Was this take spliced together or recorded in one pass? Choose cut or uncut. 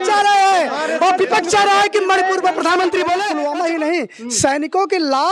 cut